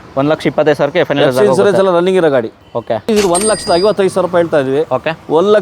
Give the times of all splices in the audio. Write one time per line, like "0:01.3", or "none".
0:03.1